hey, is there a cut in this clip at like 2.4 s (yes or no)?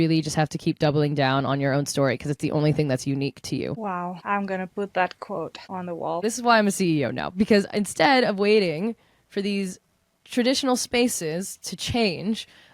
no